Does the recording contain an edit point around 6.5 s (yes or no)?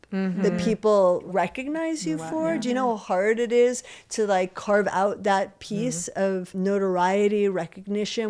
yes